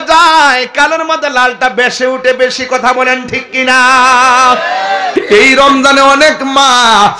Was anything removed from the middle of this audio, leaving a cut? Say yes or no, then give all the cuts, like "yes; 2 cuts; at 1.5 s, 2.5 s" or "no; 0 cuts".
yes; 1 cut; at 5.1 s